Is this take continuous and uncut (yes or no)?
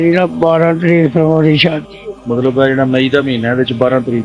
no